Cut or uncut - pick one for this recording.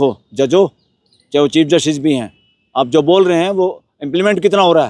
uncut